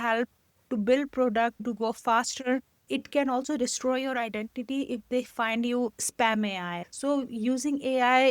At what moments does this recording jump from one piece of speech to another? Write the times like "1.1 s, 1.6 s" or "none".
1.6 s, 2.8 s, 6.8 s